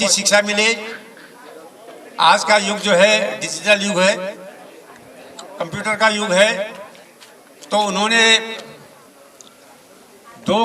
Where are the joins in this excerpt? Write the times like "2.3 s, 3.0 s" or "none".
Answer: none